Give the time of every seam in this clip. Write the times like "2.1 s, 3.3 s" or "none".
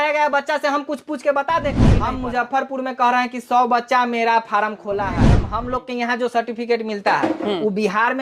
1.9 s, 5.5 s